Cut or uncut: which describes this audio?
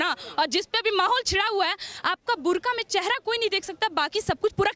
uncut